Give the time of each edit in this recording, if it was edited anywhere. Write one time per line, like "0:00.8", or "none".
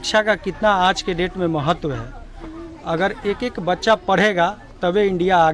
none